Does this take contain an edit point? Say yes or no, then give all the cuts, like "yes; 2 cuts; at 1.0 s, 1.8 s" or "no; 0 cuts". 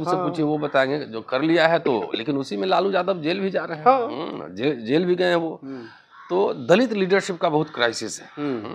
no; 0 cuts